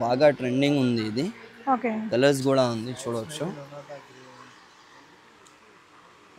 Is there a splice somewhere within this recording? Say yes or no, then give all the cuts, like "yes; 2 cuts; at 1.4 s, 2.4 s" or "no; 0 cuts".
no; 0 cuts